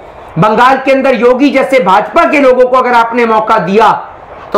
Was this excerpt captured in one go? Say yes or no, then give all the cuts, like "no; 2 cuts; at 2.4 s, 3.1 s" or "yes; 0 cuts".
yes; 0 cuts